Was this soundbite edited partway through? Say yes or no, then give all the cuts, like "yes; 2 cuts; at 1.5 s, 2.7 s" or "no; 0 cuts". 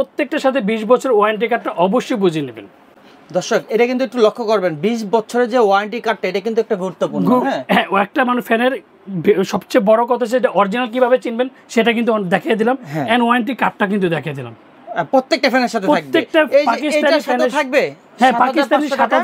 no; 0 cuts